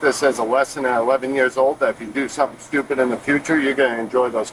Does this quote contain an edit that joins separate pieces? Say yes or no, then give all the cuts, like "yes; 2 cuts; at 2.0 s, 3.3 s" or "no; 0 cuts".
no; 0 cuts